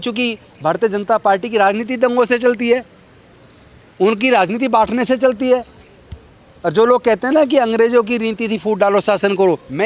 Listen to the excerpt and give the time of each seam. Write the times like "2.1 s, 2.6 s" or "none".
none